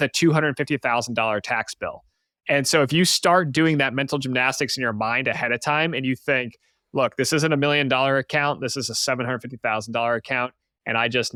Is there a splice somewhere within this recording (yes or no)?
no